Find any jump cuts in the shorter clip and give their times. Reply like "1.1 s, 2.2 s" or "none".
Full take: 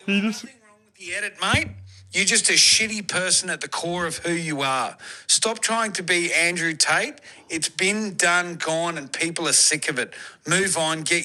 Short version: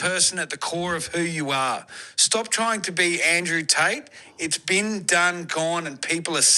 none